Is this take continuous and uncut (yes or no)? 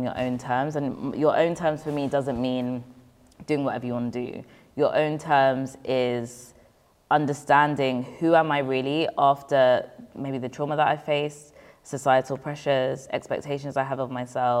yes